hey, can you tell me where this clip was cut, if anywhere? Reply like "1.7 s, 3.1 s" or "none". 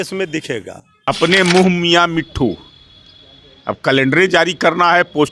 0.9 s

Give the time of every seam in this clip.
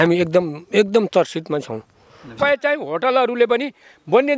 2.3 s

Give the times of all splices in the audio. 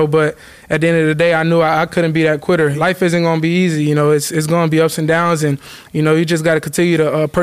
2.7 s

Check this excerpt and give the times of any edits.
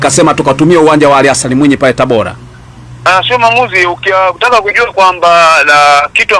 none

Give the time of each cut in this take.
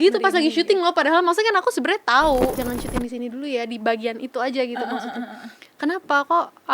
2.6 s

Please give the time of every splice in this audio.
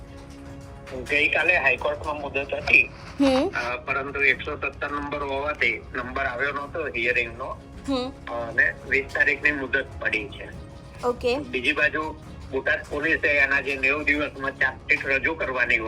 0.9 s

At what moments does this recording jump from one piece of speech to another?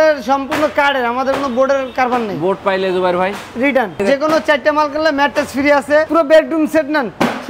4.0 s, 6.1 s

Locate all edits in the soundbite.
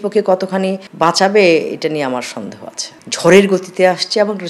3.0 s

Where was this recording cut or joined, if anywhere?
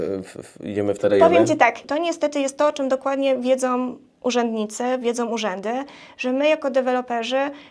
1.8 s

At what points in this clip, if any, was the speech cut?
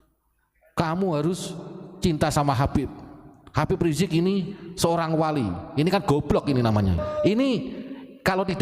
7.0 s

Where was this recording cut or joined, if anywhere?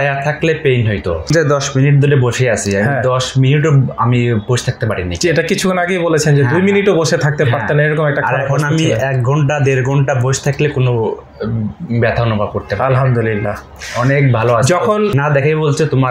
1.3 s, 15.1 s

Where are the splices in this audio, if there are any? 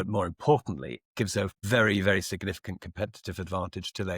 1.6 s

